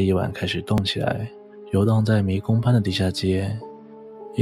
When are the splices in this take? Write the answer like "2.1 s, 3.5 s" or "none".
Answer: none

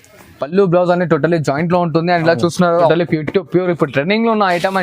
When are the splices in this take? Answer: 2.9 s

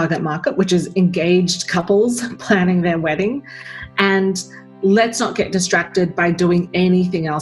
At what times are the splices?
none

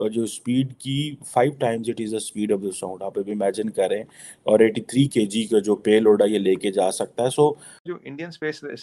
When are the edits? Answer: 7.8 s

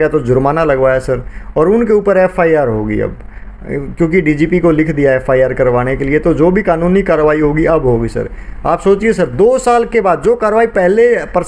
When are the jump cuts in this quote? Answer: none

